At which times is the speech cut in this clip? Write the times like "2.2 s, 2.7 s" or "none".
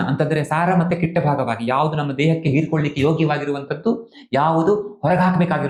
none